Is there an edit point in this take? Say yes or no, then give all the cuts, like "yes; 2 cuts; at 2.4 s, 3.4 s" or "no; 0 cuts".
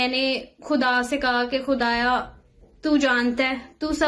no; 0 cuts